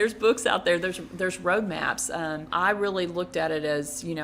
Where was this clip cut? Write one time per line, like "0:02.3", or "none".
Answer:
0:02.4